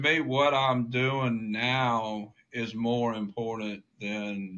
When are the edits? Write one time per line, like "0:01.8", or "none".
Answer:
none